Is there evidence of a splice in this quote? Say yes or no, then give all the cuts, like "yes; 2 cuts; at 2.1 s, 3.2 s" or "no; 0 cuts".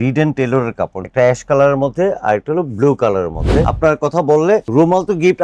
yes; 2 cuts; at 1.0 s, 3.7 s